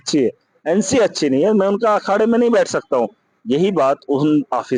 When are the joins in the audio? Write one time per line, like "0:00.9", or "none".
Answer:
none